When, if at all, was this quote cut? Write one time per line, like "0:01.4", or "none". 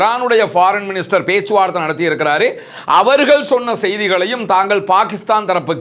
none

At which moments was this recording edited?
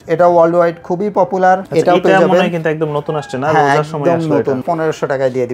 0:01.7
0:04.6

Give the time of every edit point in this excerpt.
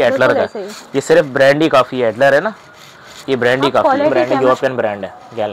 0:04.1

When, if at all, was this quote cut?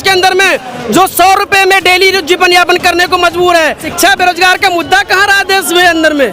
0:03.9

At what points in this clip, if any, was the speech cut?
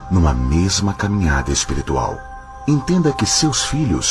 none

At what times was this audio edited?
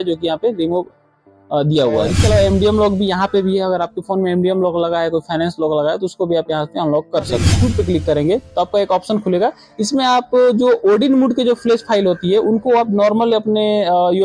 0:02.1
0:07.5

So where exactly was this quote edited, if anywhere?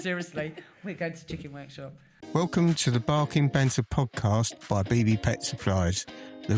0:02.2

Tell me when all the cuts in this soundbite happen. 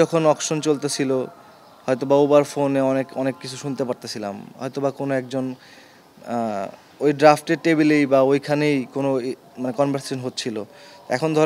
none

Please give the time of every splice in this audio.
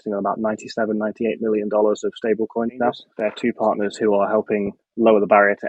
0:03.1

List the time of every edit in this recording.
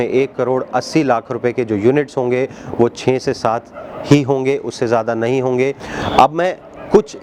0:05.9

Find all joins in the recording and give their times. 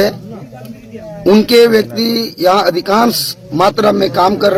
none

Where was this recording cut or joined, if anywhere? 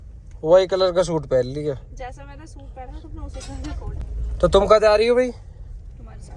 none

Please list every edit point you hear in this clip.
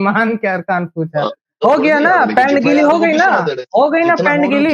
0:01.5

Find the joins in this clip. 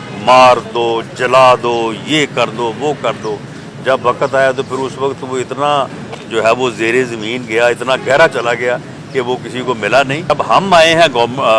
0:10.3

